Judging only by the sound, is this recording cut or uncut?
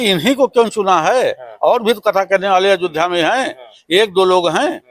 uncut